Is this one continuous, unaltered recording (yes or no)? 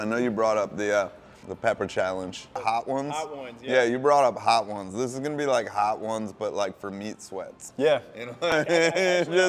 no